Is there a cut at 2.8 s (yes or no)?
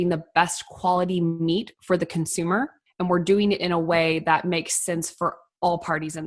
yes